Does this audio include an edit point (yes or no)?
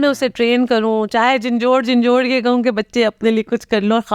no